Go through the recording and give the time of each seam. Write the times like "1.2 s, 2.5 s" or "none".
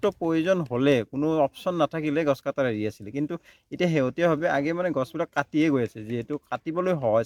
none

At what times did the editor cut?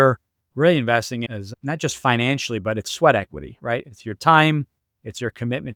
none

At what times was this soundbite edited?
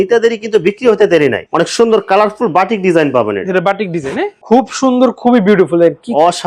1.4 s, 4.4 s

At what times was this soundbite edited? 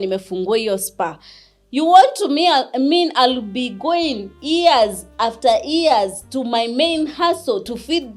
none

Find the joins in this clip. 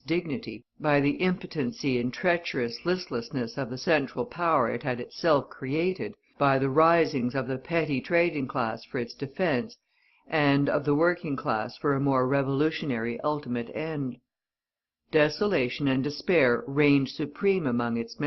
7.0 s

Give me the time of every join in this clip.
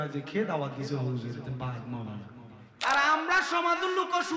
2.8 s

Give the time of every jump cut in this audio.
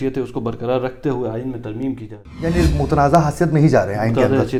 none

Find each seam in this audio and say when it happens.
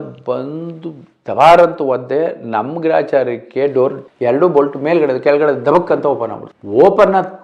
4.0 s

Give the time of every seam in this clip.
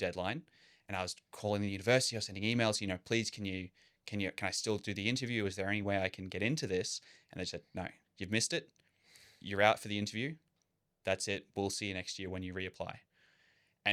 none

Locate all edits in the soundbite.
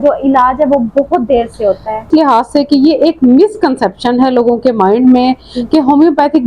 2.1 s

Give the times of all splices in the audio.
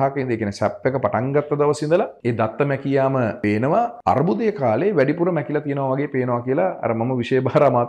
2.1 s, 3.6 s

